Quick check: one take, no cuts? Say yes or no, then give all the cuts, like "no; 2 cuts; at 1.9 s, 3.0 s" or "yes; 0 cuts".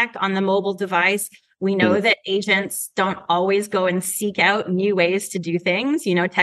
yes; 0 cuts